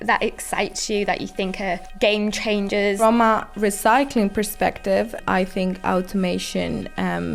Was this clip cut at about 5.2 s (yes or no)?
yes